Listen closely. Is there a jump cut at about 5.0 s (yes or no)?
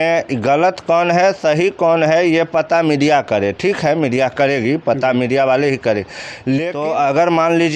no